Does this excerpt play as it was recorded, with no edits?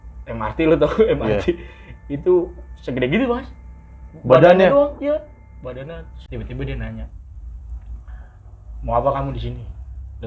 no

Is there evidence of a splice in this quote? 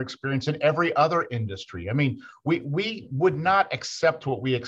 no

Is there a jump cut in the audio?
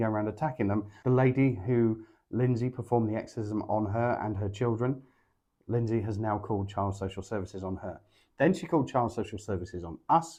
no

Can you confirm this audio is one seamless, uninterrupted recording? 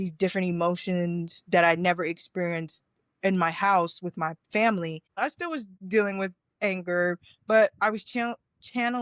no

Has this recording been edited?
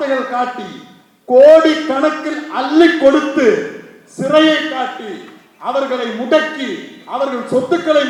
no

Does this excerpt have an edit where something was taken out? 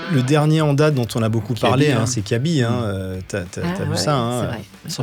no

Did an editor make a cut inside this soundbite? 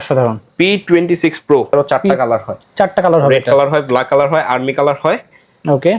yes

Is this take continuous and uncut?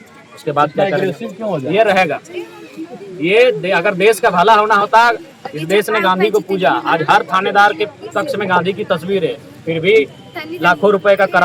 yes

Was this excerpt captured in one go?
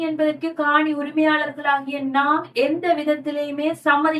yes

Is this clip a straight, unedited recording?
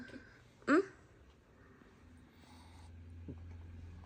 yes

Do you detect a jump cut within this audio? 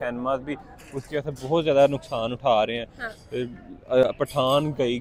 no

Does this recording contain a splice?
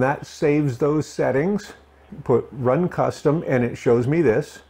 yes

